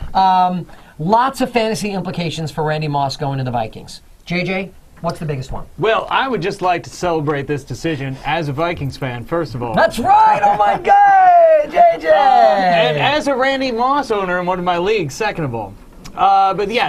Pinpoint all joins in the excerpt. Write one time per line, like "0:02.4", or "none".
0:04.7